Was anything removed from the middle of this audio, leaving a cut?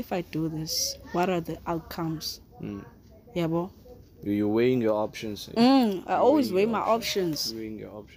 no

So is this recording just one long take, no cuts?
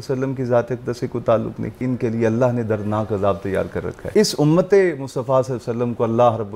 no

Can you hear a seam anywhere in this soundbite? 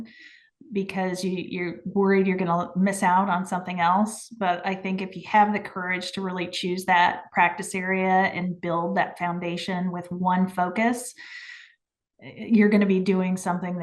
no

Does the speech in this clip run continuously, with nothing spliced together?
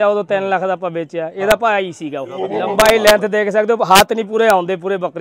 no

